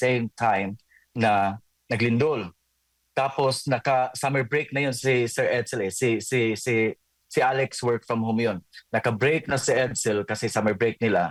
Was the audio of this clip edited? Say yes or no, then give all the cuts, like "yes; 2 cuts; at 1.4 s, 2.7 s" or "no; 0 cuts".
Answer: no; 0 cuts